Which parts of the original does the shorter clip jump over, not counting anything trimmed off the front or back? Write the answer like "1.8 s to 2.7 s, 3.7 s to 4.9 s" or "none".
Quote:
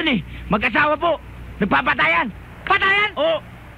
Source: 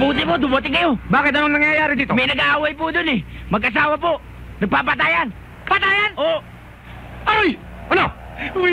none